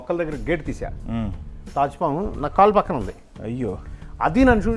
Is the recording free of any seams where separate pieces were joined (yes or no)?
yes